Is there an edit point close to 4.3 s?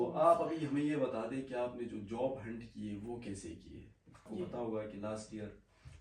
yes; 1 cut; at 4.3 s

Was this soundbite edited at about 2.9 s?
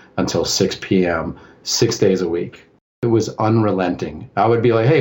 yes; 1 cut; at 2.9 s

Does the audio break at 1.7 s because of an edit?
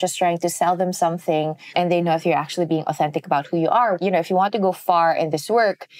yes; 2 cuts; at 1.7 s, 4.0 s

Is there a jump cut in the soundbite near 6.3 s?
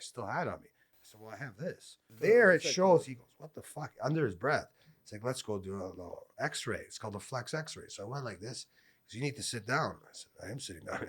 no; 1 cut; at 2.1 s

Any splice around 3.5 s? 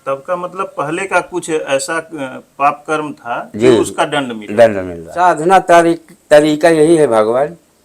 no; 1 cut; at 5.1 s

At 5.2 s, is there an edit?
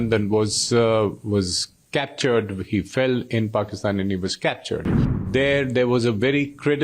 yes; 1 cut; at 5.2 s

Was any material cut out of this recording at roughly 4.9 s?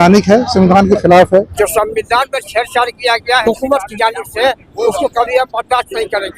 no; 2 cuts; at 1.6 s, 3.4 s

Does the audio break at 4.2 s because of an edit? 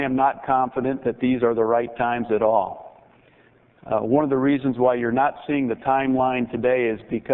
yes; 1 cut; at 4.2 s

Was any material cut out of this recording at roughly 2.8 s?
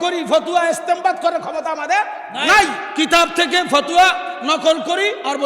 yes; 1 cut; at 2.8 s

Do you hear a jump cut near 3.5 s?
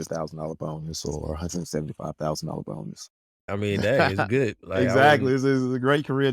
yes; 1 cut; at 3.5 s

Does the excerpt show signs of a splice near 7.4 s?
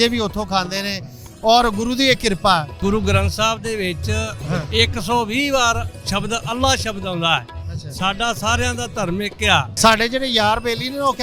no; 3 cuts; at 2.8 s, 4.4 s, 9.7 s

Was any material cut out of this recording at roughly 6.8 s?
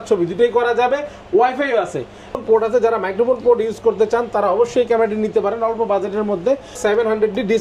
yes; 2 cuts; at 2.4 s, 6.8 s

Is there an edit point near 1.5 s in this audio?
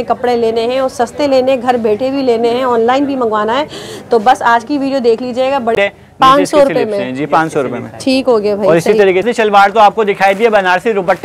no; 2 cuts; at 5.7 s, 9.2 s

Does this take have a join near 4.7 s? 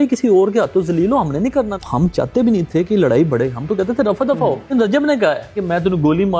yes; 2 cuts; at 1.7 s, 4.7 s

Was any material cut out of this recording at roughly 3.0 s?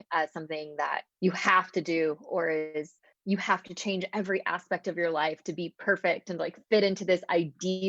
yes; 2 cuts; at 1.1 s, 3.0 s

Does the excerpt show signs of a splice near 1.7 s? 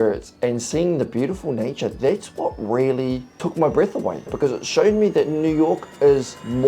no; 1 cut; at 4.3 s

